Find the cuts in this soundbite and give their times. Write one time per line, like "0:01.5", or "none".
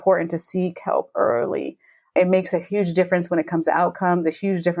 none

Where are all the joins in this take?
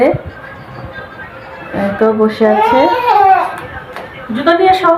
none

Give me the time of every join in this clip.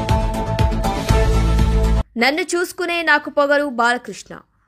none

